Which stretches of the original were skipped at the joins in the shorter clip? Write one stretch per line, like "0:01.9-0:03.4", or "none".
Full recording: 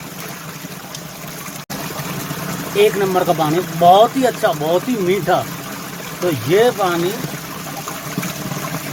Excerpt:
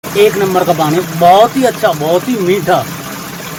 none

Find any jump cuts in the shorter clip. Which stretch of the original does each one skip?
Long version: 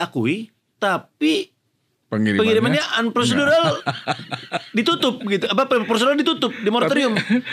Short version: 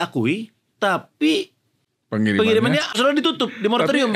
0:03.0-0:06.0

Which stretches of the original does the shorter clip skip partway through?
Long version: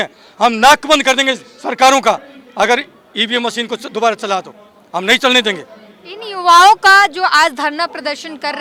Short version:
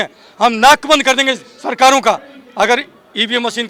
none

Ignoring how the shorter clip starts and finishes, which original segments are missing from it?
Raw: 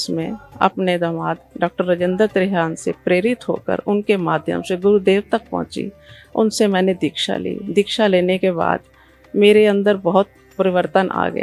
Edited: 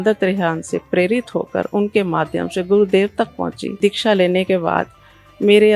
0:05.8-0:07.6

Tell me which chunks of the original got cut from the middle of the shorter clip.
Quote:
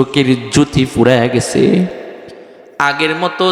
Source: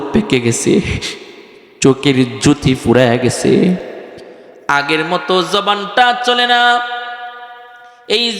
none

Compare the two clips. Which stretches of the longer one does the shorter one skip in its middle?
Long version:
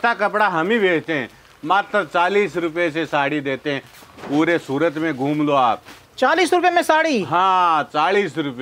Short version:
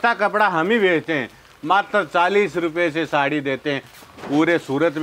none

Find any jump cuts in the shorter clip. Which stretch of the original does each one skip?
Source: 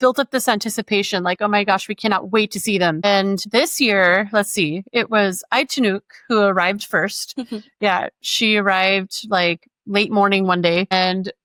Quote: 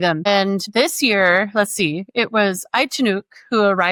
none

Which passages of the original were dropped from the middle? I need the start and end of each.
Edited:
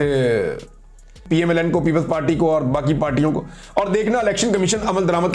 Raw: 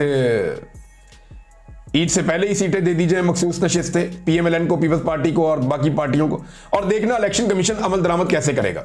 0:01.2-0:04.2

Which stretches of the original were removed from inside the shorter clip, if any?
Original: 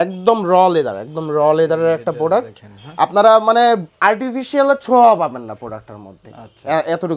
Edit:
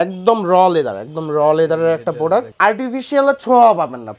0:02.5-0:03.9

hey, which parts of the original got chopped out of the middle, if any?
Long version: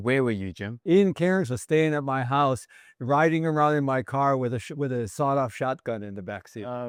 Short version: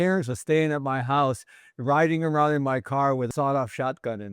0:04.5-0:05.1

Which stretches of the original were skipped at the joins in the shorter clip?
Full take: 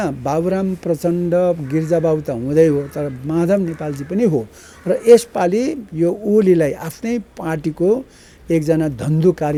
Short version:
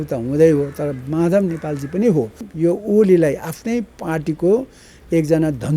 0:04.6-0:05.8

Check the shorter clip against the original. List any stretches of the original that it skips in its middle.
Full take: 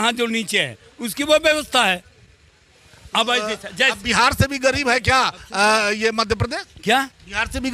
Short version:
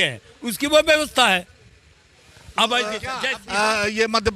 0:03.9-0:05.4

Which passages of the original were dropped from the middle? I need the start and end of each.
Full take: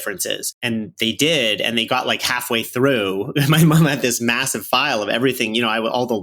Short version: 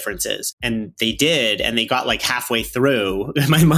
none

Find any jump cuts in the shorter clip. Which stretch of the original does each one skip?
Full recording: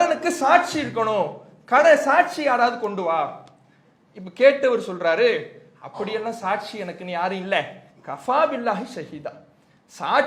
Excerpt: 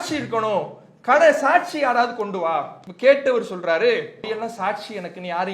0:03.4-0:04.2
0:05.6-0:06.1

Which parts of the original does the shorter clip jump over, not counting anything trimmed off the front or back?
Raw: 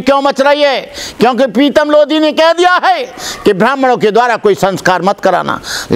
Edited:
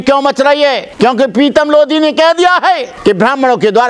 0:00.9-0:01.1
0:03.1-0:03.3

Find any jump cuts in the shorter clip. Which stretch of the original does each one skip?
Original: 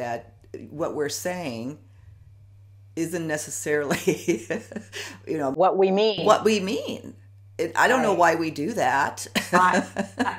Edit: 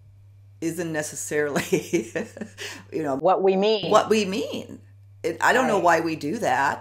none

